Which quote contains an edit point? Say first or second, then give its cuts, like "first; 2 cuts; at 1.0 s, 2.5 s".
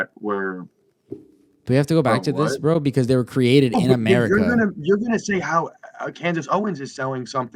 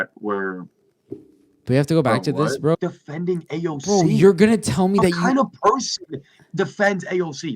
second; 1 cut; at 2.8 s